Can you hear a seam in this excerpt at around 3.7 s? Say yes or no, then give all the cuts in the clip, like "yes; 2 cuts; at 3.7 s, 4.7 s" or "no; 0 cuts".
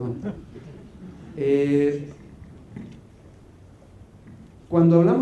no; 1 cut; at 1.4 s